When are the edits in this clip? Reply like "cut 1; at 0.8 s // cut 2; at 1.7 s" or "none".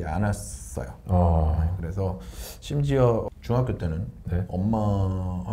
cut 1; at 3.2 s

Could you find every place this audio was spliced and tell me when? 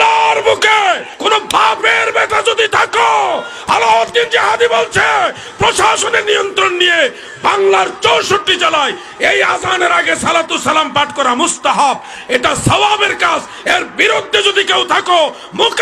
cut 1; at 1.1 s

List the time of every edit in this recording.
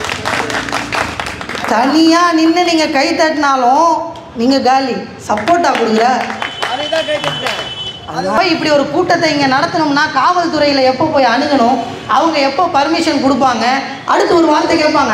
cut 1; at 8.4 s

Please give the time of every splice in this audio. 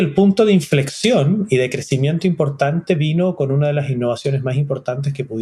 none

